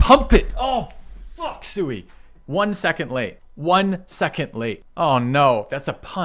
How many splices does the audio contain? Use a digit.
2